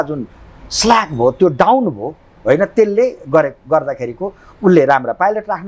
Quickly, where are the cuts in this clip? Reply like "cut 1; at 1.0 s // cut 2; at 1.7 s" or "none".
none